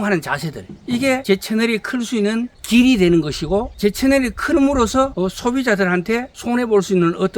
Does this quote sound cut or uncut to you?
cut